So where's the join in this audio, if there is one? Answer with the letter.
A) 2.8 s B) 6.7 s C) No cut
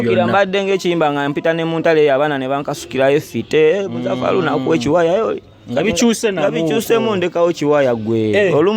C